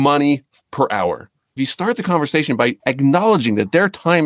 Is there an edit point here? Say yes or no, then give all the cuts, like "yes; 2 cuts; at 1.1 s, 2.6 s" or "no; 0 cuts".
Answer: yes; 2 cuts; at 1.5 s, 2.8 s